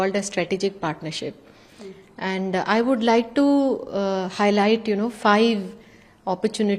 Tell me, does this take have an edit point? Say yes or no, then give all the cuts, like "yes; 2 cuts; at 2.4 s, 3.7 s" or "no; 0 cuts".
no; 0 cuts